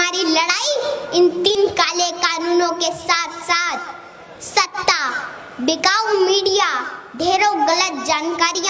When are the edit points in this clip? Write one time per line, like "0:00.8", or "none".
0:01.5